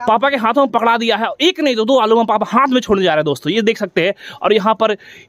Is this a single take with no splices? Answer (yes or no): yes